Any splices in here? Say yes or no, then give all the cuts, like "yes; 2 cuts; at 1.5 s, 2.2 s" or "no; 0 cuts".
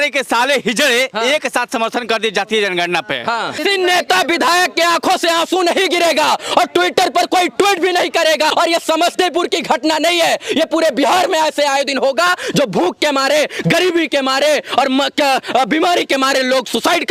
yes; 2 cuts; at 3.6 s, 8.5 s